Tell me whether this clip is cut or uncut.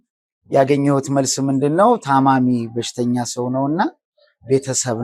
uncut